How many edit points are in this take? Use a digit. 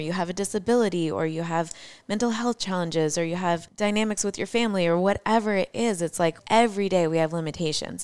2